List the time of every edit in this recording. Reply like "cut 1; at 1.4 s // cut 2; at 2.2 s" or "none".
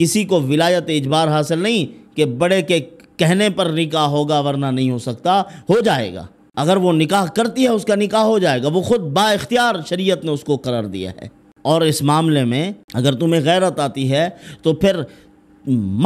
cut 1; at 12.8 s